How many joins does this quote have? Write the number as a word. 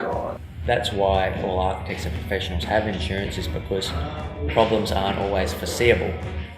one